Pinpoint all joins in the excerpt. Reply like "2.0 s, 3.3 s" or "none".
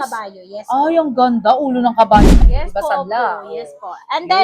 2.2 s